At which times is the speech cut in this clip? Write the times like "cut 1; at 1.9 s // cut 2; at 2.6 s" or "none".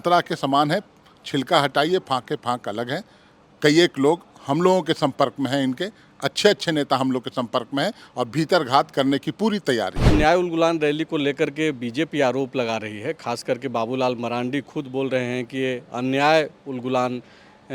cut 1; at 10.0 s